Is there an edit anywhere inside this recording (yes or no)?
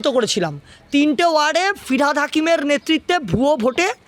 no